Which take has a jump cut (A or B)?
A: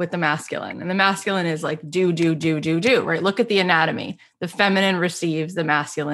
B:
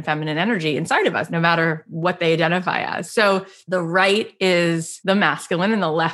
B